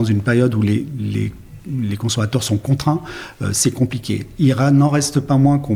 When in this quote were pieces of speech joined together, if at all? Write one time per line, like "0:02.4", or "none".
none